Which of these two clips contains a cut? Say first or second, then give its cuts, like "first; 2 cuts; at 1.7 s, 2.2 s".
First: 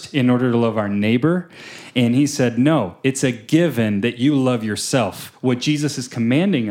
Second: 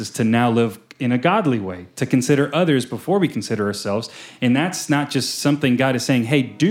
first; 1 cut; at 5.2 s